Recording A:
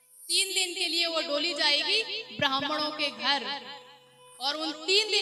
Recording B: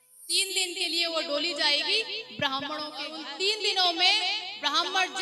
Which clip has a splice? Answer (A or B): B